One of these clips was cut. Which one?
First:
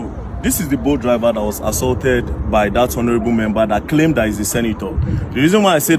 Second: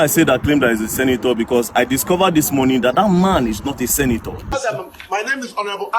second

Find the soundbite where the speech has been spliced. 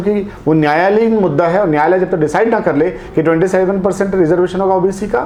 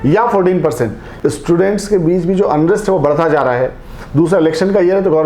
second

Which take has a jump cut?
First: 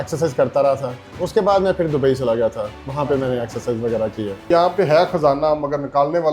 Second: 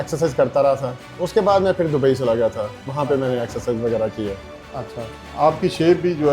first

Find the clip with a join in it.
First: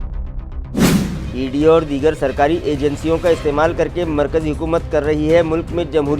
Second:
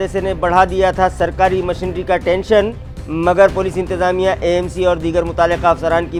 first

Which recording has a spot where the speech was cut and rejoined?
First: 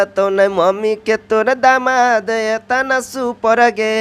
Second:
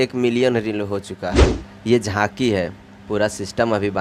second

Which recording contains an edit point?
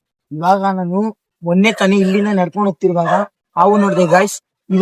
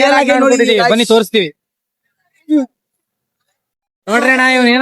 second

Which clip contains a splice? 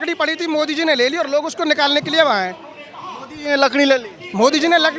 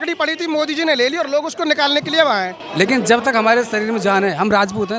second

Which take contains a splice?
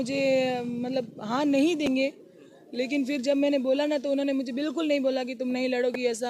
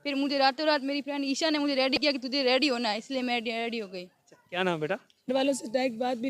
second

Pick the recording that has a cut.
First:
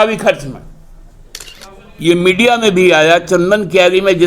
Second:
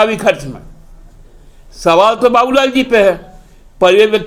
first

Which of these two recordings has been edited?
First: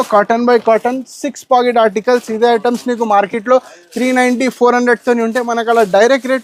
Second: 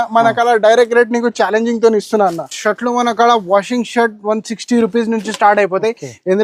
second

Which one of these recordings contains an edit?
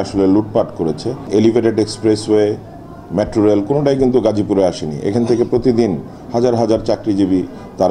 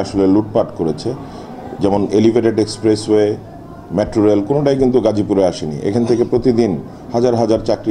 first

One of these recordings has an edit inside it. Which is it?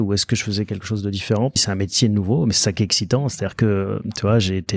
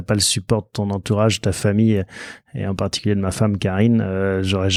first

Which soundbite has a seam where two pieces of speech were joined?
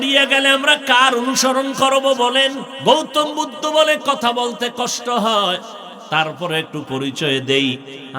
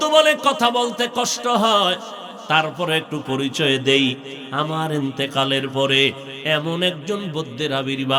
first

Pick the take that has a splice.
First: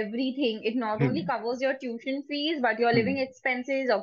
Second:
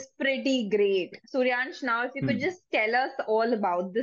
second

